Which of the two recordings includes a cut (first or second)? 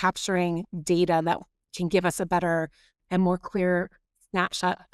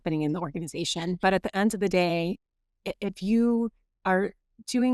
second